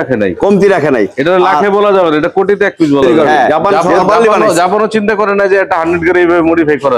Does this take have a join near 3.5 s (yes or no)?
yes